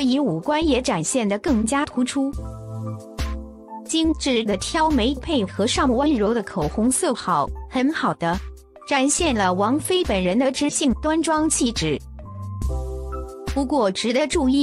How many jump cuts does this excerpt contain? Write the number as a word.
four